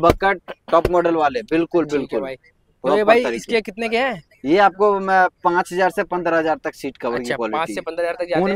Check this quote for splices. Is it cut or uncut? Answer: uncut